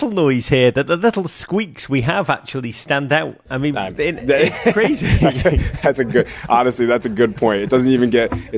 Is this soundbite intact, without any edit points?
yes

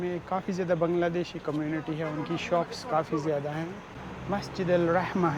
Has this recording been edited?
yes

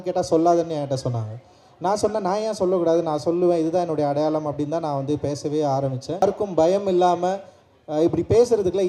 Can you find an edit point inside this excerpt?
yes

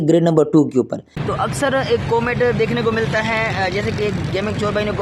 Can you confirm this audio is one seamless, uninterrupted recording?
no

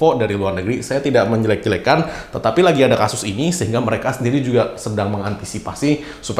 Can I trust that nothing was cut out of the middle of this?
yes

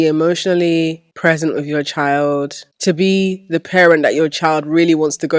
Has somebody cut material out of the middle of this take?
yes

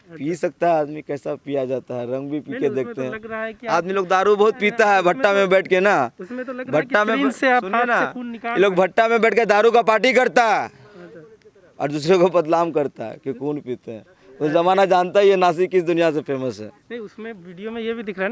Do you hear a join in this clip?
no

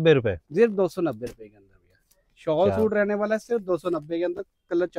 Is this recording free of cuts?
yes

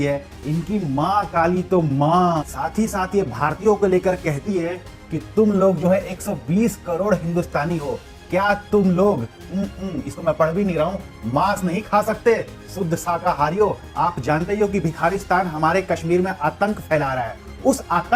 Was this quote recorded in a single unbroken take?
yes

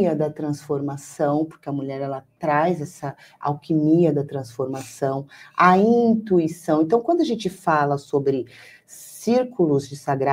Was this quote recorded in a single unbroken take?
yes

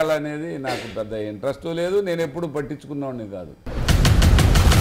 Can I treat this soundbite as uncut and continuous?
no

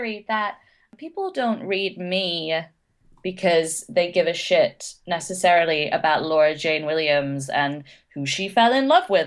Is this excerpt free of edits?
no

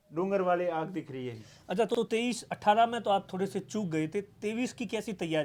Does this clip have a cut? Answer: no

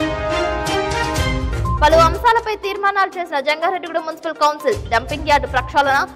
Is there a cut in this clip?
no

